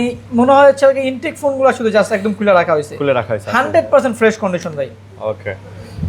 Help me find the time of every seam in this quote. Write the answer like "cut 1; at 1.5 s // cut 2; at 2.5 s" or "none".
none